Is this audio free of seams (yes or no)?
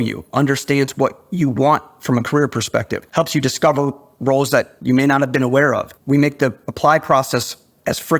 no